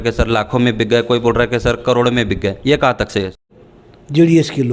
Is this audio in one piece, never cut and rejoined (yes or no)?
no